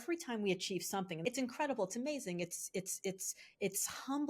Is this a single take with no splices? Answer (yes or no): no